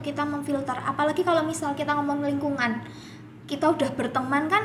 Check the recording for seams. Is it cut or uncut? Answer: uncut